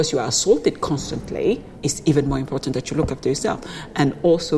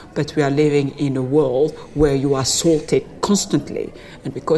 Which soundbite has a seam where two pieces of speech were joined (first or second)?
first